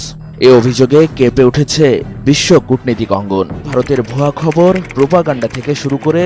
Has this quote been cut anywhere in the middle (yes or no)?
yes